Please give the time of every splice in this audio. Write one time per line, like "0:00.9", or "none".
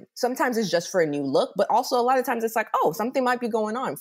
none